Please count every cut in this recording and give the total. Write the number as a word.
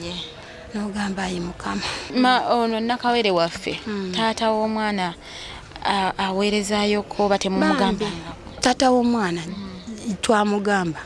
one